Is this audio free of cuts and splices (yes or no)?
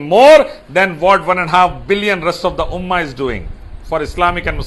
yes